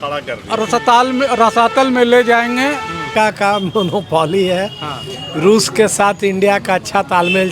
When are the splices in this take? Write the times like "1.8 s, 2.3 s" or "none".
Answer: 3.1 s

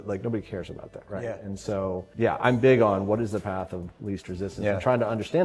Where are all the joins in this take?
2.1 s

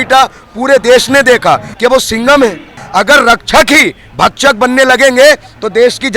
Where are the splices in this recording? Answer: 1.7 s, 2.7 s

